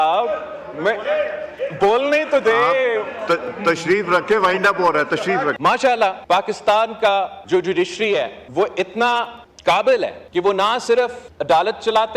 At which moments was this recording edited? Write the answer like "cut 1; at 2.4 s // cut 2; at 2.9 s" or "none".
cut 1; at 5.6 s // cut 2; at 6.2 s // cut 3; at 7.4 s // cut 4; at 8.4 s // cut 5; at 9.4 s // cut 6; at 10.2 s // cut 7; at 11.3 s